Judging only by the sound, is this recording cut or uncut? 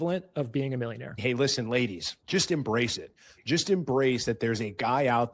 cut